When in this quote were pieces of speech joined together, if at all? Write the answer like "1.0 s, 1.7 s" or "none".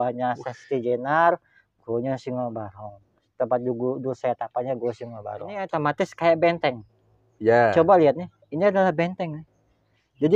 5.6 s